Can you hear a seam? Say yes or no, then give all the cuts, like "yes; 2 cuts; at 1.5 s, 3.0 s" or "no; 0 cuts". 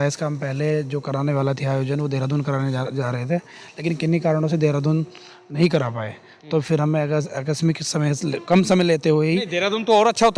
no; 0 cuts